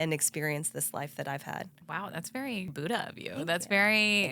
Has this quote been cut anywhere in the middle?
yes; 2 cuts; at 1.8 s, 2.7 s

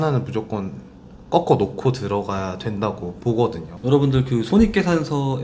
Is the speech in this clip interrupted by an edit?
no; 0 cuts

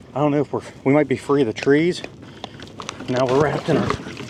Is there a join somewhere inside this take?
no; 0 cuts

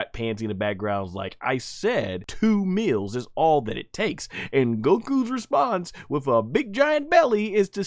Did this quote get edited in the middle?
yes; 1 cut; at 2.2 s

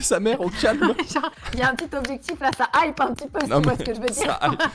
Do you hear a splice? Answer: yes; 1 cut; at 1.3 s

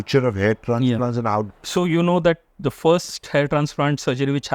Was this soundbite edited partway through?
yes; 1 cut; at 1.6 s

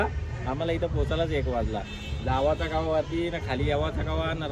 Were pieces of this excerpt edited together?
no; 0 cuts

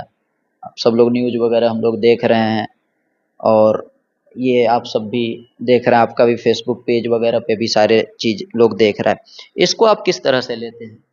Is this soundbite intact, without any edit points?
yes; 0 cuts

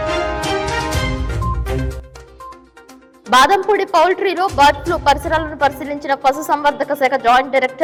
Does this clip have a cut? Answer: no; 0 cuts

